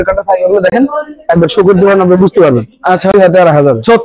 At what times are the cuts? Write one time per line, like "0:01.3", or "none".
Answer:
0:03.1